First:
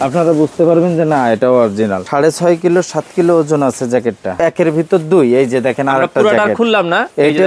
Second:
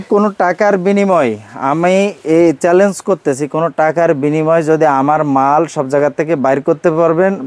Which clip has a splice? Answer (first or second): first